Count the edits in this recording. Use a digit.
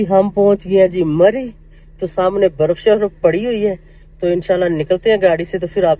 0